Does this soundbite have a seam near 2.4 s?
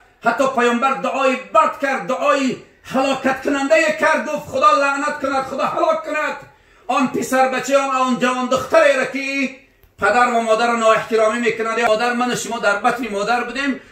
no; 1 cut; at 11.9 s

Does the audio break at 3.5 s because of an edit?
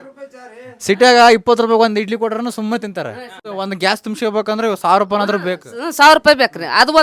yes; 1 cut; at 3.5 s

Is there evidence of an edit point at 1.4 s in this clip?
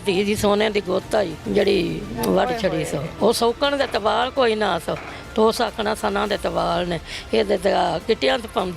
yes; 2 cuts; at 1.4 s, 3.1 s

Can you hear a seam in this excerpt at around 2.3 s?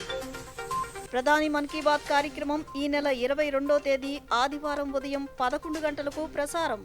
no; 1 cut; at 0.9 s

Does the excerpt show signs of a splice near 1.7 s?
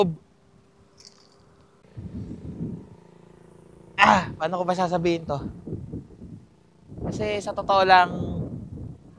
yes; 1 cut; at 1.7 s

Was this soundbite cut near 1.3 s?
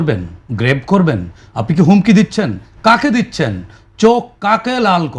no; 0 cuts

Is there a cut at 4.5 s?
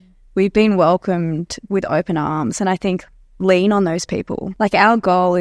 yes; 1 cut; at 4.5 s

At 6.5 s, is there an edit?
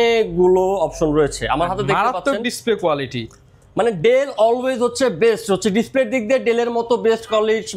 no; 0 cuts

